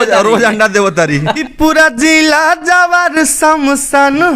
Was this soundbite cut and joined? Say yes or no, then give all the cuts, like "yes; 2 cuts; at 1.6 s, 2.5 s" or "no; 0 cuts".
yes; 1 cut; at 1.4 s